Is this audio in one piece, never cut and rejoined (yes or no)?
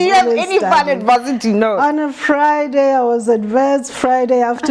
yes